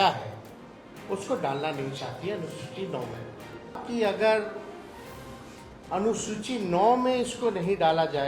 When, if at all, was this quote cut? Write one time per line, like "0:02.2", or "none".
0:03.8